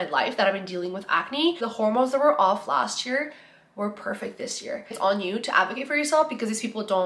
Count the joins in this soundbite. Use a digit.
2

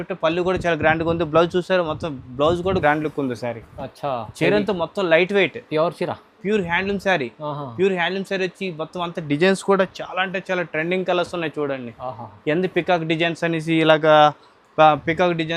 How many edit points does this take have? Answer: 1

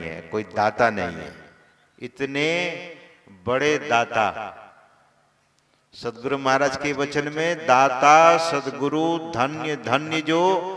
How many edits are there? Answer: 0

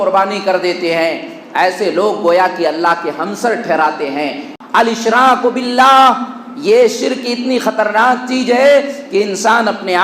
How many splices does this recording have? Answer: 1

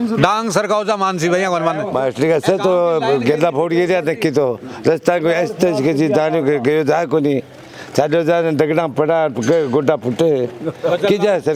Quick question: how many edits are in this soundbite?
1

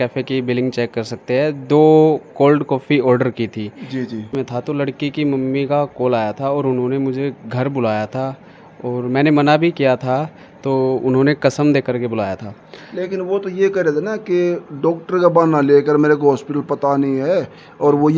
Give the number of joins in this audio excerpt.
1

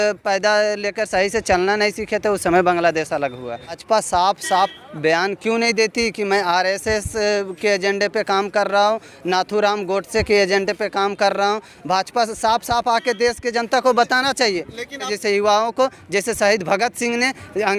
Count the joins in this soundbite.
2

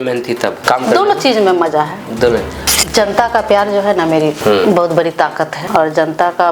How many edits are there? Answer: 3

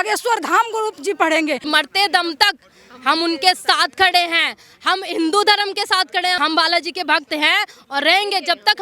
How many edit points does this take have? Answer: 2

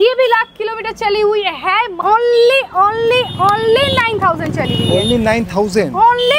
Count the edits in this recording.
1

